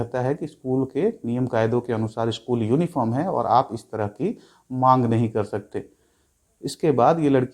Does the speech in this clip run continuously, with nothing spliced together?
yes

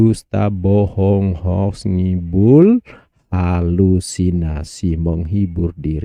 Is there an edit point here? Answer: no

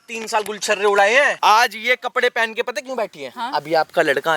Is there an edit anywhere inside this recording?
yes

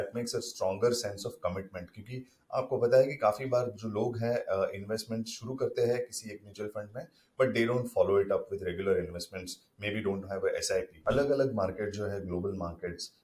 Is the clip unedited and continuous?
no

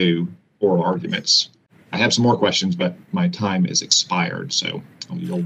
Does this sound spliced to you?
no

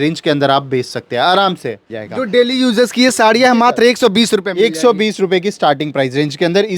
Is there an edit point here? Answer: yes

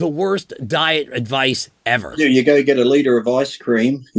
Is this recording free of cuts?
no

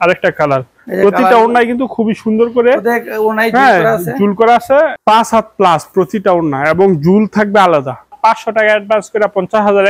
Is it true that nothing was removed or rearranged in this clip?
no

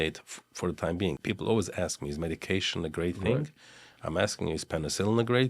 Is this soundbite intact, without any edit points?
no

